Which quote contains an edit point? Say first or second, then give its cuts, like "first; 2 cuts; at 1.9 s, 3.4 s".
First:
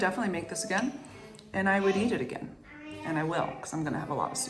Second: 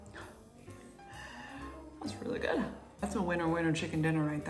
second; 1 cut; at 3.0 s